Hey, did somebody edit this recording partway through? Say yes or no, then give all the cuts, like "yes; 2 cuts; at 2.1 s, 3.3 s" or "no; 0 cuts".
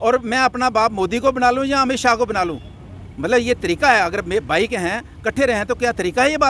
no; 0 cuts